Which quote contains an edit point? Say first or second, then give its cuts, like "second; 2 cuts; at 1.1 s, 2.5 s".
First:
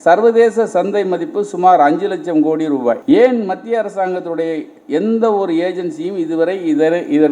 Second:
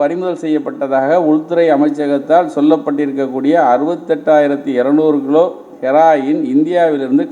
first; 1 cut; at 3.0 s